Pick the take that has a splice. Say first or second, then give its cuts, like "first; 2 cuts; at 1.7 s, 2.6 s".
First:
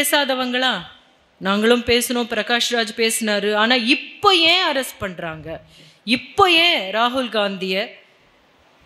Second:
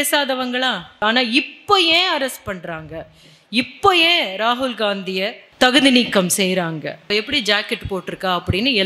second; 3 cuts; at 1.0 s, 5.4 s, 7.1 s